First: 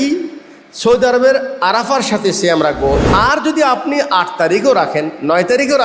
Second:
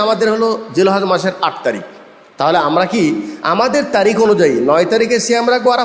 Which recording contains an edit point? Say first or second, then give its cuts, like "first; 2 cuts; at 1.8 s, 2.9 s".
first; 1 cut; at 3.0 s